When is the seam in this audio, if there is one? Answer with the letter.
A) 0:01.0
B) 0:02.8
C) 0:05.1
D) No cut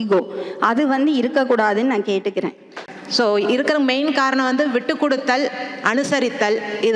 B